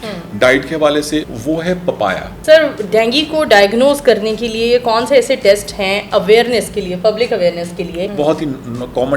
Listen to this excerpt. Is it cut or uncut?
cut